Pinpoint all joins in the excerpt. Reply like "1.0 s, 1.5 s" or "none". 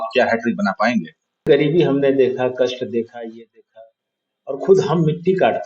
1.5 s